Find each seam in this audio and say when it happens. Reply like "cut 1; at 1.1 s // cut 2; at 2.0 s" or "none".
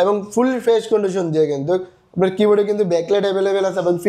none

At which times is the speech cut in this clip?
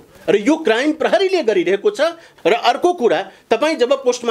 none

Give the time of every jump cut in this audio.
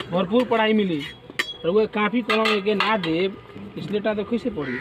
none

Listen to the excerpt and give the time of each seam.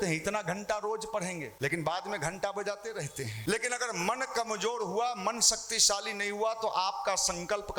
cut 1; at 1.5 s // cut 2; at 3.3 s

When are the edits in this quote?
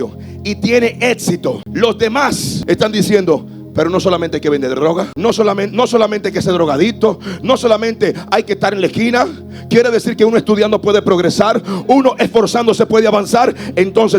cut 1; at 1.7 s // cut 2; at 2.5 s // cut 3; at 5.1 s

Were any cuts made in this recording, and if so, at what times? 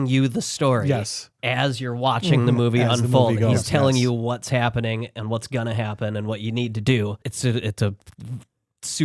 cut 1; at 7.3 s

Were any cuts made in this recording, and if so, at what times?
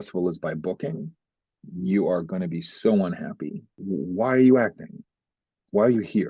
cut 1; at 3.6 s

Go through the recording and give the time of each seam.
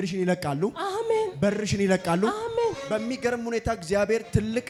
none

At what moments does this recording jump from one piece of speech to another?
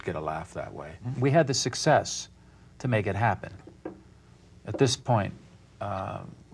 cut 1; at 1.1 s

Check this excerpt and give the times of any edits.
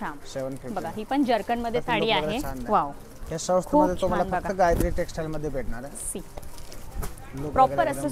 none

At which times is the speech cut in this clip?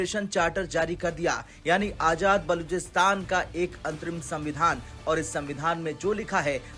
none

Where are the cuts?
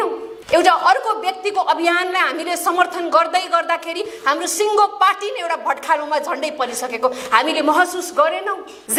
none

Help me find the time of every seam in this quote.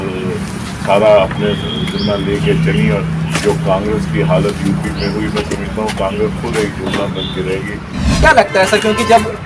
cut 1; at 7.9 s

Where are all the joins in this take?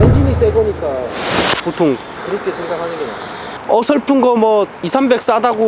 cut 1; at 2.1 s // cut 2; at 3.5 s

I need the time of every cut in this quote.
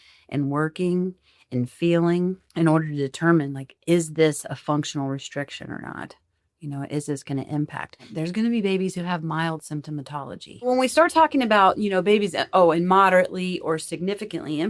cut 1; at 2.4 s // cut 2; at 8.0 s // cut 3; at 10.7 s

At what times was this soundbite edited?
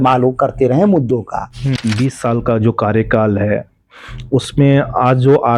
cut 1; at 1.7 s

